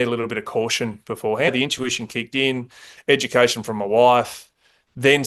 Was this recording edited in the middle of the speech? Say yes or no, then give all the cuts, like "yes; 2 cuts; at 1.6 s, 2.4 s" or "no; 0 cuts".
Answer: yes; 1 cut; at 1.5 s